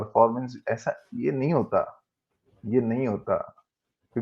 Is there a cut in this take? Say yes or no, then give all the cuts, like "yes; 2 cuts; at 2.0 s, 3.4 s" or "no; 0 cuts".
no; 0 cuts